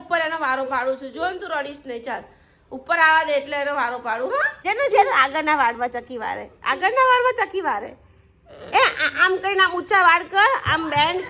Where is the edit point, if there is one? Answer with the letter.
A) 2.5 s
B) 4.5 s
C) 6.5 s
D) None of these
B